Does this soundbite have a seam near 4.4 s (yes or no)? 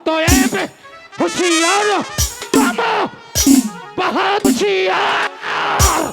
yes